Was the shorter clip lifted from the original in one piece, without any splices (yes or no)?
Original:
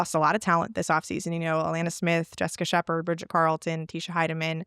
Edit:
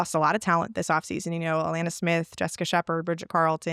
yes